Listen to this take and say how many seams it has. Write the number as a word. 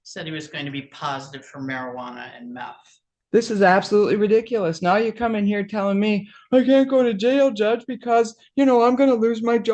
one